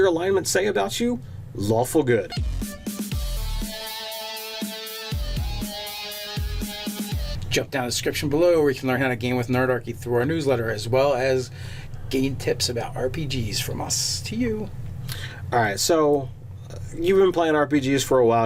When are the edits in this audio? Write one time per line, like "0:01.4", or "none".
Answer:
none